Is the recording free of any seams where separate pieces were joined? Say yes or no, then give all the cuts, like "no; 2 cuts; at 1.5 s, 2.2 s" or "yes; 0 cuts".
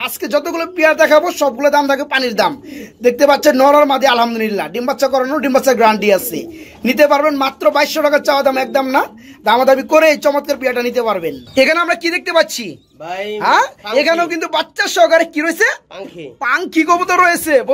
yes; 0 cuts